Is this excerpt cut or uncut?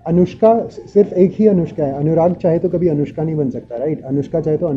uncut